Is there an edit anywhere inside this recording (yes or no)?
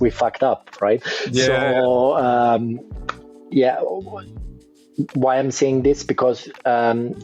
no